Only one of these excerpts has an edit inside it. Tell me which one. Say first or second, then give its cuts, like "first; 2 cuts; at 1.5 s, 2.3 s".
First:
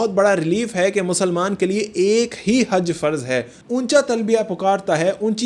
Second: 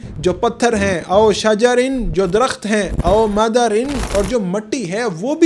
first; 1 cut; at 3.6 s